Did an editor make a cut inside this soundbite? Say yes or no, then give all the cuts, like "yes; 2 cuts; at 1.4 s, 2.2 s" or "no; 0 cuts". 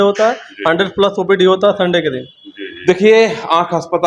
no; 0 cuts